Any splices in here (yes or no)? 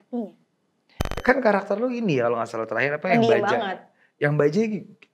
yes